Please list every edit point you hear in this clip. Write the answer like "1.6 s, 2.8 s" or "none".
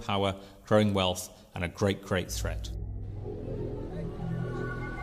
3.1 s